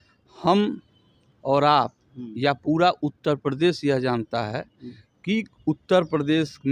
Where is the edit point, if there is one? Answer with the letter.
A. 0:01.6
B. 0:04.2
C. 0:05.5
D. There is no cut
D